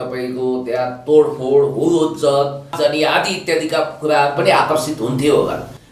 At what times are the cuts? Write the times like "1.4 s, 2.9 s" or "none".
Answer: none